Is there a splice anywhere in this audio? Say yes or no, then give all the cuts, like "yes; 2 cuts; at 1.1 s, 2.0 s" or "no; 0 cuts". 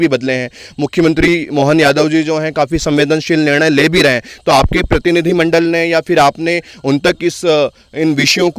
no; 0 cuts